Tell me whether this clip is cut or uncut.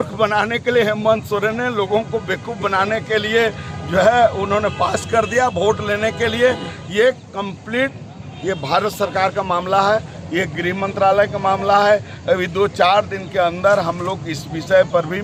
uncut